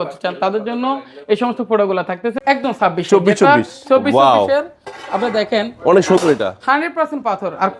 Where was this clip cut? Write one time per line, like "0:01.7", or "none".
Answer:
0:02.3